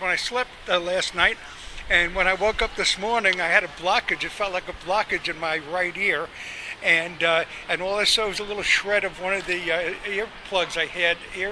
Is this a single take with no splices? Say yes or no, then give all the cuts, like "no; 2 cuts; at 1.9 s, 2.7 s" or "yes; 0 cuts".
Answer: no; 1 cut; at 10.1 s